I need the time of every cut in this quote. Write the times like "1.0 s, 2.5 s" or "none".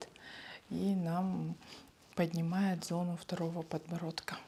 none

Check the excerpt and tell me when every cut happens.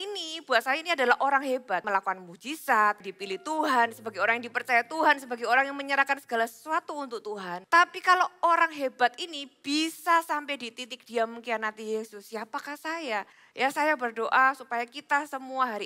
1.8 s, 3.1 s, 7.5 s, 13.4 s

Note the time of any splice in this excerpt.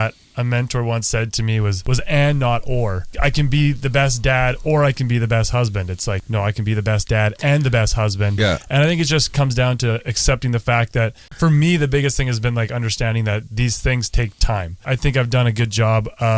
1.8 s, 3.0 s, 6.2 s, 11.3 s, 14.8 s

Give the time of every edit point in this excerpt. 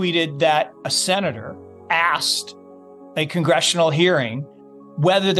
none

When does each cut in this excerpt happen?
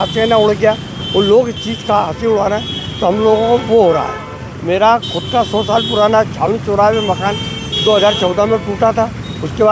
none

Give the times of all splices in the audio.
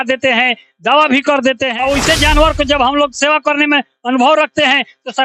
1.7 s

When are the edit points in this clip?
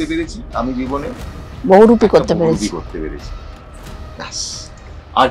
none

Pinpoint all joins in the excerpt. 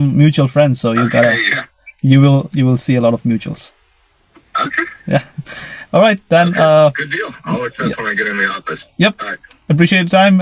none

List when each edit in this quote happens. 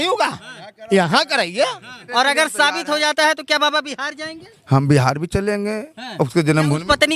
1.9 s

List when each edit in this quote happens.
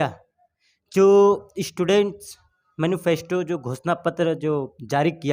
none

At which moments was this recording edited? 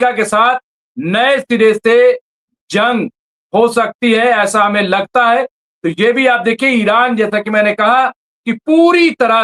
none

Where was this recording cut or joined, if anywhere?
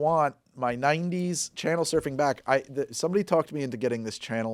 none

